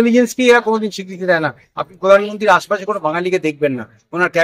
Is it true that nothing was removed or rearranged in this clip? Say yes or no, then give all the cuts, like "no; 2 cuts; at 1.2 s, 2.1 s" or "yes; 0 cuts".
yes; 0 cuts